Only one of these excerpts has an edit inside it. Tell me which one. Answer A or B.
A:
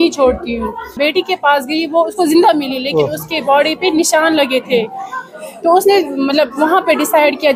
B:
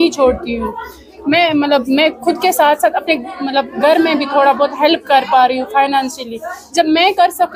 A